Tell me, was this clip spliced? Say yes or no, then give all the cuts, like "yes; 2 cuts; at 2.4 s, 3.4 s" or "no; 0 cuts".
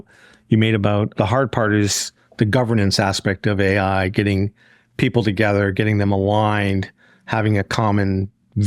yes; 1 cut; at 1.1 s